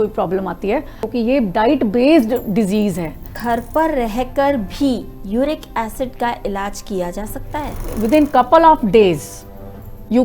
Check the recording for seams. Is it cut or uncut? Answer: cut